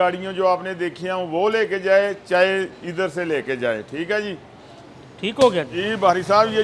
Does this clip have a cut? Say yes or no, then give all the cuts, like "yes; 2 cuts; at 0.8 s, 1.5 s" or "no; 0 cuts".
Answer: yes; 1 cut; at 5.7 s